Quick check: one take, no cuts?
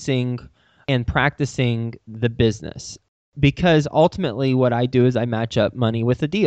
yes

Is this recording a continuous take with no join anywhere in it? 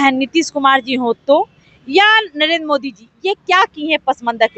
yes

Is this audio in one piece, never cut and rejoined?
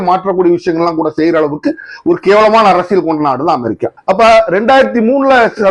yes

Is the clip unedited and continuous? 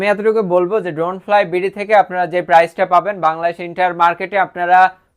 yes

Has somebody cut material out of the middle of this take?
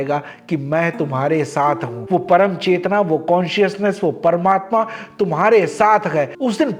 no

